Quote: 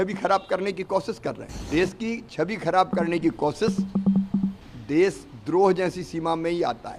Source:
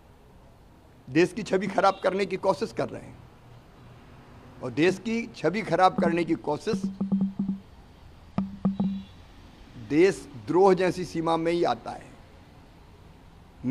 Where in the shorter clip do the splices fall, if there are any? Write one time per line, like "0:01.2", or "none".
0:01.5
0:04.7